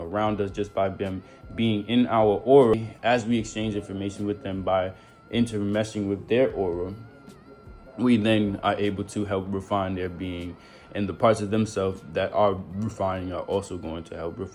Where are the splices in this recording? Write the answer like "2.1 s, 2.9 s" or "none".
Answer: 2.7 s